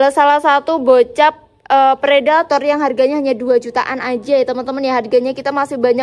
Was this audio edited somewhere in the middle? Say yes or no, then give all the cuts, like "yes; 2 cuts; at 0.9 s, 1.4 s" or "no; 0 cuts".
no; 0 cuts